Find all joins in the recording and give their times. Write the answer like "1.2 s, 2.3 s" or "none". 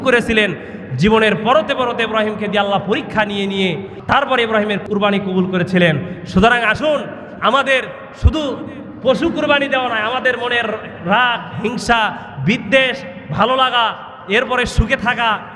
4.0 s, 4.8 s